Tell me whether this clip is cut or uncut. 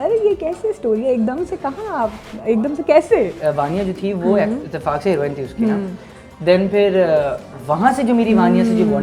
cut